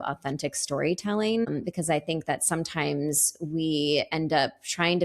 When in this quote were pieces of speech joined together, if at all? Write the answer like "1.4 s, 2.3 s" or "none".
1.5 s